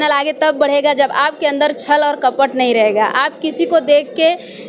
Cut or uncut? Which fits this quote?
uncut